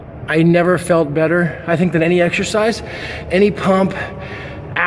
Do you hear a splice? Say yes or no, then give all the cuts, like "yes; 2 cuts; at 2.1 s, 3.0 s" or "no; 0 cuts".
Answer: no; 0 cuts